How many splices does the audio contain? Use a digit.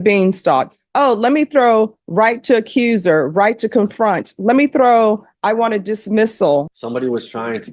1